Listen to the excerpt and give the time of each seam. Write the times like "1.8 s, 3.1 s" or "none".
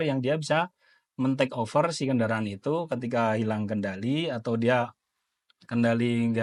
none